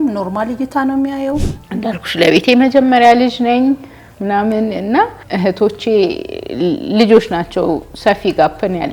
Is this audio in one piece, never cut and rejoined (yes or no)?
no